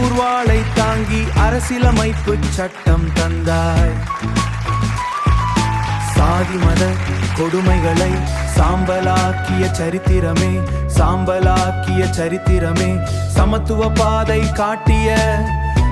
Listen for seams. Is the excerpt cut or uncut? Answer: uncut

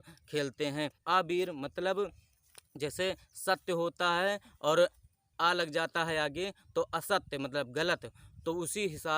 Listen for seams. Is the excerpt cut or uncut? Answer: cut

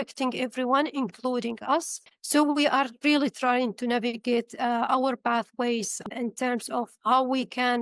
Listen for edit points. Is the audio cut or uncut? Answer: cut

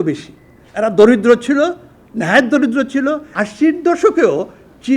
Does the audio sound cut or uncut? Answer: cut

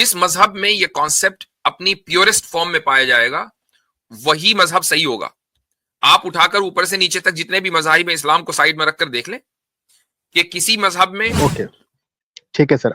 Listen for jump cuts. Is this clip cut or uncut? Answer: cut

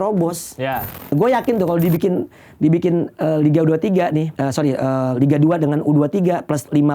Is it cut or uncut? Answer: cut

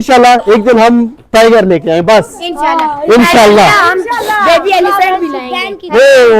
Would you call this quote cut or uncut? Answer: uncut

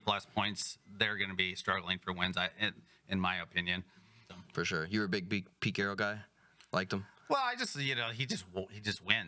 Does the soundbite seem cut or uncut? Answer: cut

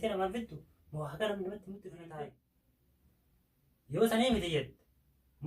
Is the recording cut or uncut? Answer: cut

